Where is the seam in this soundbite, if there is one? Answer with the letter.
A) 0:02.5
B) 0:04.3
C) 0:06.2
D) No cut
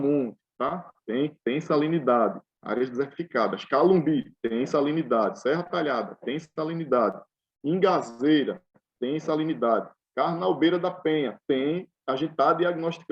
A